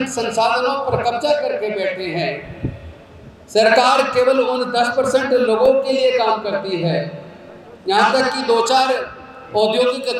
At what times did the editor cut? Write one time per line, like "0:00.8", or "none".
none